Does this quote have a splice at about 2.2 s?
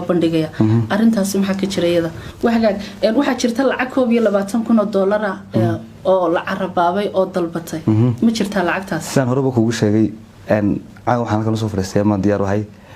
yes; 1 cut; at 2.2 s

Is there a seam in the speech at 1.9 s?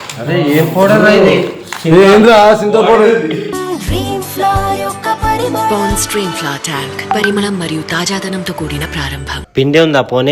no; 1 cut; at 9.4 s

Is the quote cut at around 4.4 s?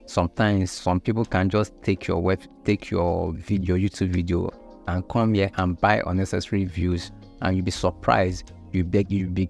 no; 0 cuts

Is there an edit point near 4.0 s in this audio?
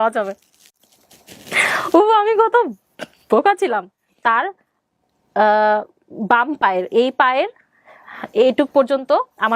yes; 1 cut; at 4.0 s

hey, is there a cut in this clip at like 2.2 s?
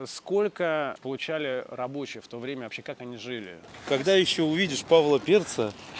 no; 2 cuts; at 1.0 s, 3.7 s

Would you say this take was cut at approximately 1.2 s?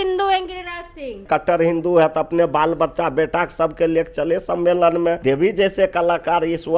yes; 2 cuts; at 1.2 s, 5.2 s

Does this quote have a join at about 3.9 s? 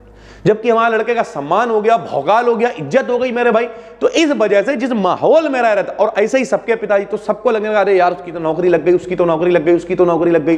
no; 0 cuts

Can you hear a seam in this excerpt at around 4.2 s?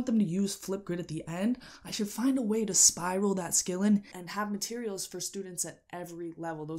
yes; 1 cut; at 4.2 s

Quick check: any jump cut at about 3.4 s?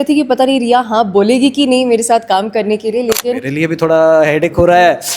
yes; 1 cut; at 3.4 s

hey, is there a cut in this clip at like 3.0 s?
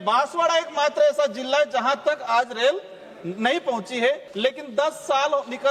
no; 1 cut; at 4.3 s

